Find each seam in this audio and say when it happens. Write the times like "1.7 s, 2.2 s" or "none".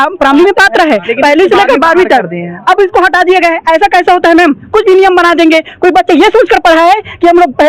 none